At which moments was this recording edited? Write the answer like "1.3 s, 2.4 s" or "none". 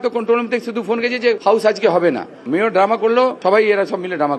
1.4 s, 3.4 s